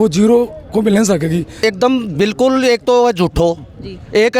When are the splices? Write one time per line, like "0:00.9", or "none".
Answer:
0:01.5